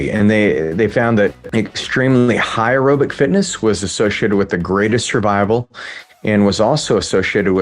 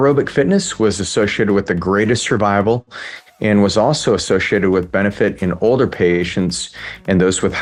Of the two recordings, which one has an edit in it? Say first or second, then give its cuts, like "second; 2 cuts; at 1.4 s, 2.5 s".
first; 1 cut; at 1.4 s